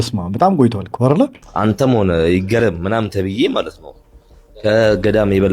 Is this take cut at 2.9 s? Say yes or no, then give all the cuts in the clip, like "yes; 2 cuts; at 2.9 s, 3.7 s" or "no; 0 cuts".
no; 1 cut; at 1.4 s